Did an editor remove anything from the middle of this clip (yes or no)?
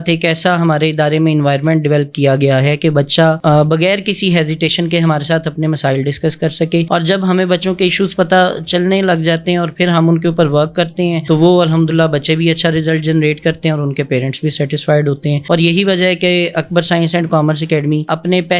no